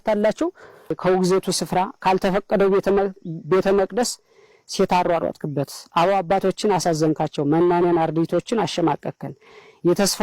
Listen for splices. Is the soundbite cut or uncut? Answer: cut